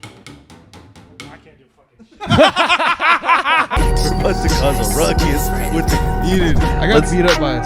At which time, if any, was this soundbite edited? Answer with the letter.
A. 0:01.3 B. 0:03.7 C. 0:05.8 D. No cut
B